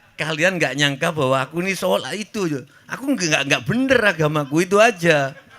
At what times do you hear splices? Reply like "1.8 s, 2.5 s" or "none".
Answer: none